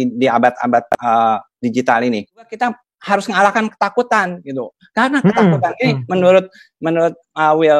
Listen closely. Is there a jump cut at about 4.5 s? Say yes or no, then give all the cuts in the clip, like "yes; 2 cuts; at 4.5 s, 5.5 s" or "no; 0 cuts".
no; 1 cut; at 2.5 s